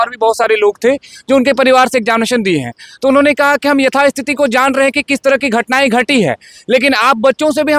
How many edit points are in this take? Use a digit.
0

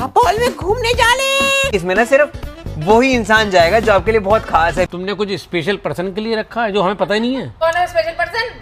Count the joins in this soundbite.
3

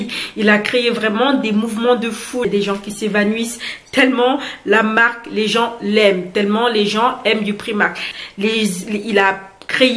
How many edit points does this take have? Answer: 1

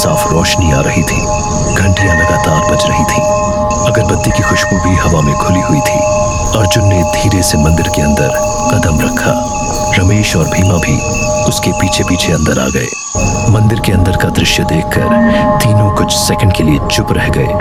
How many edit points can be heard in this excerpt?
0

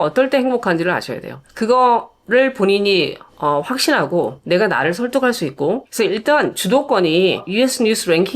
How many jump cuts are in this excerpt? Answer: 1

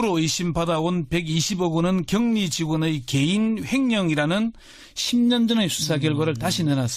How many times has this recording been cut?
1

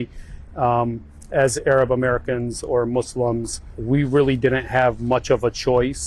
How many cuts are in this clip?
0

